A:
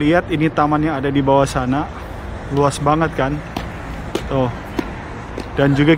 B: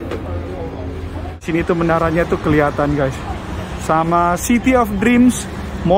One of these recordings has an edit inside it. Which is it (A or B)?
B